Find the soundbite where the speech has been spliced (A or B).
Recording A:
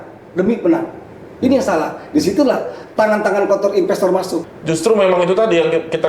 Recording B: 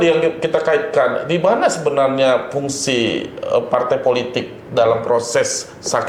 A